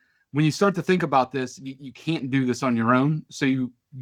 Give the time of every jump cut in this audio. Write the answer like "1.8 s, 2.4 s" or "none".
none